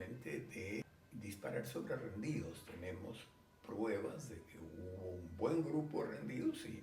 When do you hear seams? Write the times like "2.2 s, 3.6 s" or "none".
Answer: 1.0 s